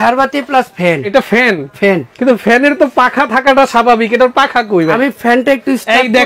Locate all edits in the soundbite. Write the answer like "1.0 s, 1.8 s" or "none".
1.0 s, 2.1 s, 4.9 s